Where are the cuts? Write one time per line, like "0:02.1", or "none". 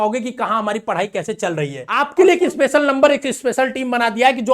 0:01.8